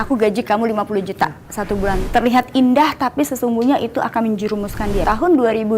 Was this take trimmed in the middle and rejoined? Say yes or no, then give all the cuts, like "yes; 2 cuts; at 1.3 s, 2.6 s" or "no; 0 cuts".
yes; 2 cuts; at 2.0 s, 5.0 s